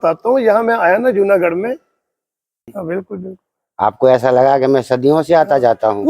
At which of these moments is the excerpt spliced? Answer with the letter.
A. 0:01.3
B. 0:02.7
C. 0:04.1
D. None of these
B